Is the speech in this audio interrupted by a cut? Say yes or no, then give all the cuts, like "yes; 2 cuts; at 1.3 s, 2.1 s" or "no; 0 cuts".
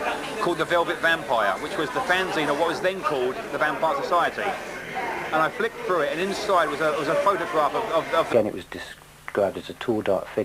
no; 0 cuts